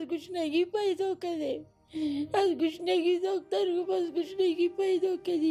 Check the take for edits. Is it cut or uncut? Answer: uncut